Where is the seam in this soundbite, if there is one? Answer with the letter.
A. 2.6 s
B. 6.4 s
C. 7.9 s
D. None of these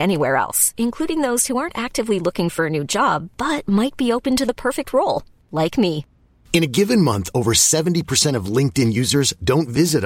D